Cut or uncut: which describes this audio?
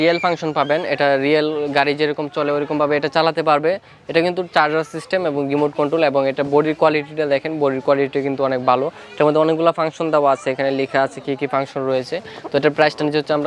uncut